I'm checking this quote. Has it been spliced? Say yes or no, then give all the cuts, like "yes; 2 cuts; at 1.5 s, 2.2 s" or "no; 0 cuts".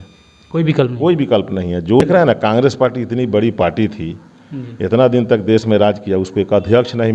yes; 1 cut; at 2.0 s